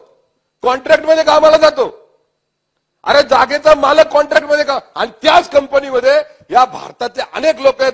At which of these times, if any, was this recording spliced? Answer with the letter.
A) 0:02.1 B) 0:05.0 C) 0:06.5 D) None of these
D